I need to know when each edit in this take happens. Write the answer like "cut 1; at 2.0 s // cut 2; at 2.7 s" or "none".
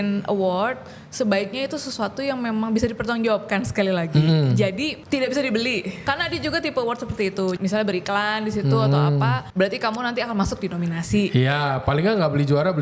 cut 1; at 5.0 s // cut 2; at 6.0 s // cut 3; at 7.6 s // cut 4; at 9.4 s

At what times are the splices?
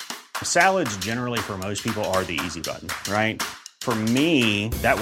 none

